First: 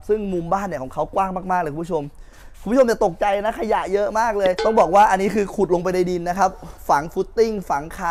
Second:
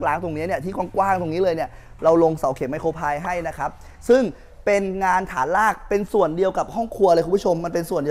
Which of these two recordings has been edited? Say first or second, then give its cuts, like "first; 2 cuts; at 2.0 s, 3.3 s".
first; 1 cut; at 4.6 s